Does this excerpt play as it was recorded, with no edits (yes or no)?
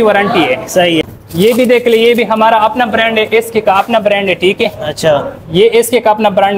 no